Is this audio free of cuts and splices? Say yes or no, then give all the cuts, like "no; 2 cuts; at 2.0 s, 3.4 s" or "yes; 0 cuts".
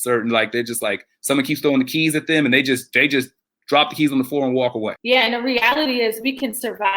no; 1 cut; at 5.0 s